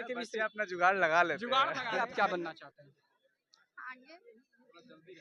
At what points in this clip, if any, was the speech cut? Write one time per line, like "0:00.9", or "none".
0:01.8